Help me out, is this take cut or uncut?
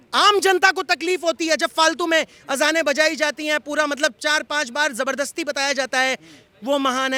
uncut